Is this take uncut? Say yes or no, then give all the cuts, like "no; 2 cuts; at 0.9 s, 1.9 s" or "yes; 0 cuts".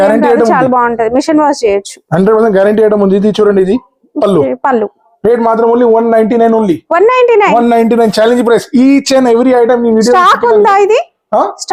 yes; 0 cuts